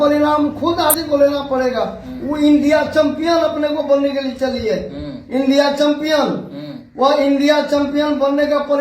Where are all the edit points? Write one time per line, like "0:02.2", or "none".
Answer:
0:00.9